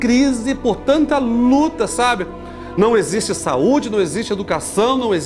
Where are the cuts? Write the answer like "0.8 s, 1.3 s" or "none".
none